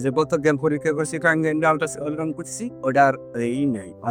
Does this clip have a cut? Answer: no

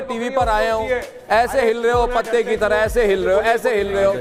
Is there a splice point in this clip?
no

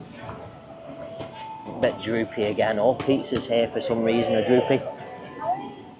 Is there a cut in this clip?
no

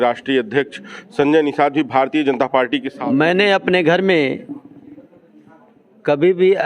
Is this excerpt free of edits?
no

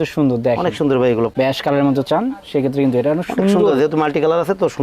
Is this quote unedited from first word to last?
no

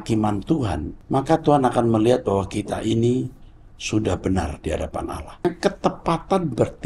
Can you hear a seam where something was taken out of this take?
yes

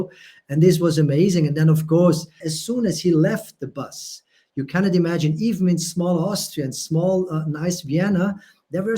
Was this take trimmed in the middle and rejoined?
yes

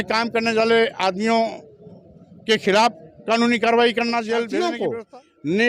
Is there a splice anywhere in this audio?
yes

